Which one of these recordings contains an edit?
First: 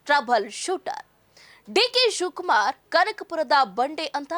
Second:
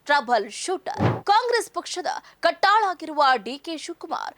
second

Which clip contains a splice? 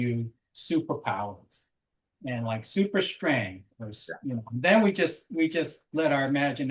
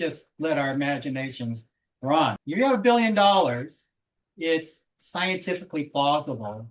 second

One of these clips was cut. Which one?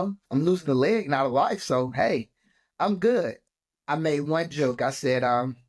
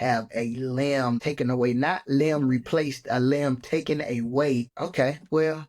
second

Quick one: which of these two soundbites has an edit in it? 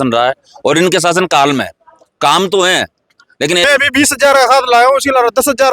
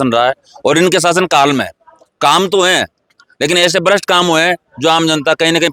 first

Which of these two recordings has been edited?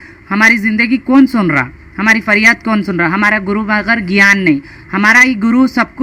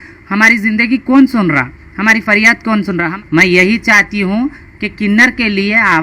second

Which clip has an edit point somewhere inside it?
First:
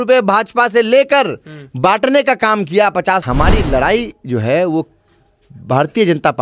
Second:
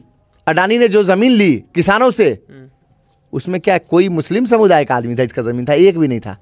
first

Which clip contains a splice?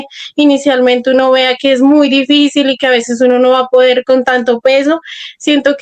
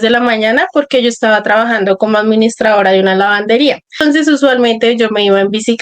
second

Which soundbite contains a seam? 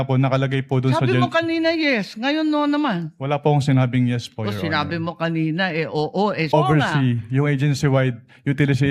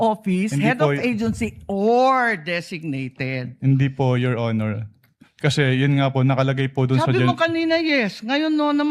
first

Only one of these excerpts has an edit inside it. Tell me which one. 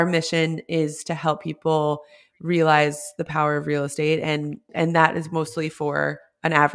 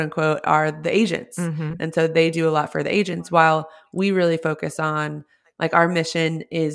first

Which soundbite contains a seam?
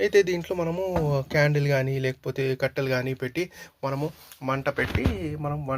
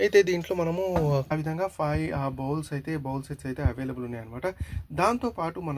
second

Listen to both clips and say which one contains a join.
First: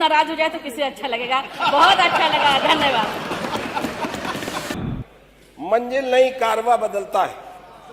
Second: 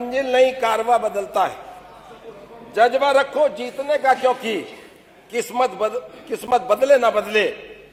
first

